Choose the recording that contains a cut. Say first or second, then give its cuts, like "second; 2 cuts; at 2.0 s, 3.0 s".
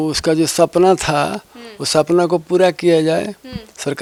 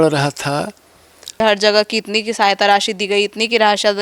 second; 1 cut; at 1.4 s